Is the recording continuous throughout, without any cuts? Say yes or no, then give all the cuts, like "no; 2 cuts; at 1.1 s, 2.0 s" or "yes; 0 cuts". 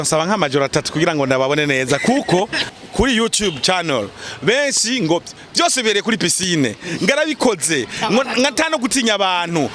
no; 1 cut; at 2.6 s